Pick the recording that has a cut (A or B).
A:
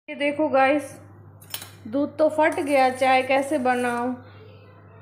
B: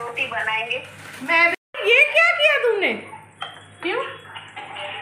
B